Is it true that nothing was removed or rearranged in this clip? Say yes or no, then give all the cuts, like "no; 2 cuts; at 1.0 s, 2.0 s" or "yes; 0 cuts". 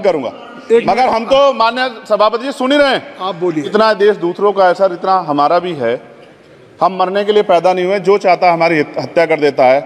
no; 1 cut; at 3.7 s